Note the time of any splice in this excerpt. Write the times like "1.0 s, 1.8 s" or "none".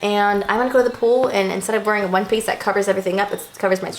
none